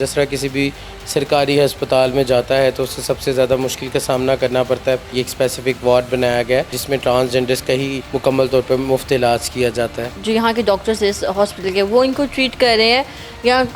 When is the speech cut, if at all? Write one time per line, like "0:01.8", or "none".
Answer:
0:05.1
0:06.8
0:08.0
0:10.1